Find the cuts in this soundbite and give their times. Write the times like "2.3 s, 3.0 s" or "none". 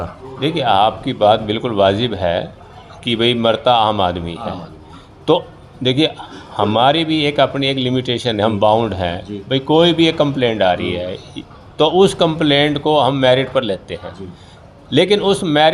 none